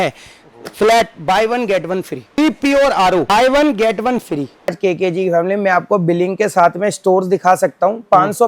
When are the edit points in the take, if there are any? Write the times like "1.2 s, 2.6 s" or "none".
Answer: 2.4 s, 3.3 s, 4.8 s

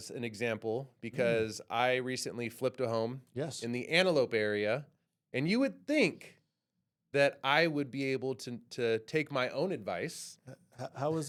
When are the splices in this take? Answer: none

